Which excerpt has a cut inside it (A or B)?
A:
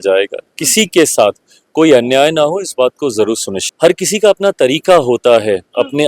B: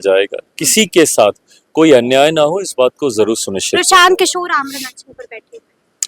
A